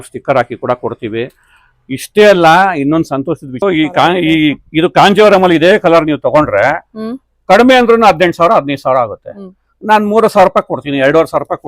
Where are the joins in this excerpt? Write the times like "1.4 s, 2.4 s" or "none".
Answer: 3.6 s